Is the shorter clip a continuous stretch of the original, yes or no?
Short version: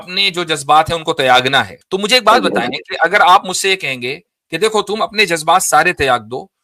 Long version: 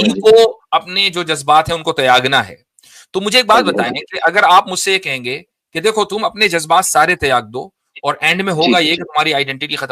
no